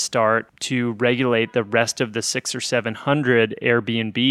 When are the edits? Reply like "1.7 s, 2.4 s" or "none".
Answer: none